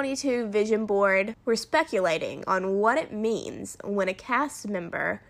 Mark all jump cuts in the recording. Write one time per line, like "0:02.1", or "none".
0:01.3